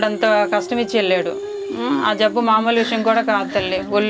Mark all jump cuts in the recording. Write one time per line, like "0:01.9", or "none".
none